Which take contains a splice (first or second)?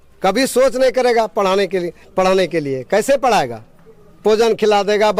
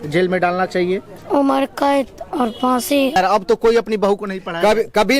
second